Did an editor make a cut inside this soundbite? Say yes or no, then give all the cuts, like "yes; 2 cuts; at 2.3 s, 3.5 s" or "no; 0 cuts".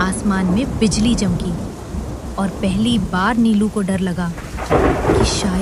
no; 0 cuts